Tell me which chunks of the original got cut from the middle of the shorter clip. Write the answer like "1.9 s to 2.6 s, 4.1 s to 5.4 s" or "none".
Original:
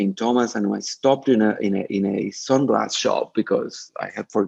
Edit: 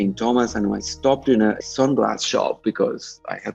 1.6 s to 2.3 s